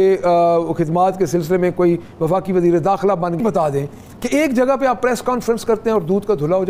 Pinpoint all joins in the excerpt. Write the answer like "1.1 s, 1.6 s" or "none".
3.4 s